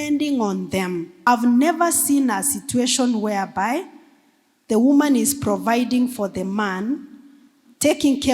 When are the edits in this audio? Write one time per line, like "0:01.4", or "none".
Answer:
0:01.2